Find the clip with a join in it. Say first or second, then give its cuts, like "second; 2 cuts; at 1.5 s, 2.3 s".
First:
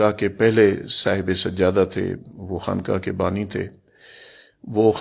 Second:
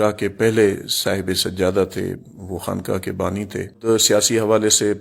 second; 1 cut; at 3.8 s